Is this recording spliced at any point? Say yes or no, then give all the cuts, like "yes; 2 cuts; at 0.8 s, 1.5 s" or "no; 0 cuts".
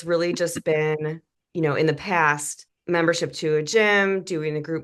no; 0 cuts